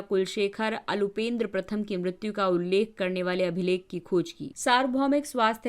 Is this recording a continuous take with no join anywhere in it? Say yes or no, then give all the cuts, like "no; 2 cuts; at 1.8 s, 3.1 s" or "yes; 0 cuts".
no; 1 cut; at 4.4 s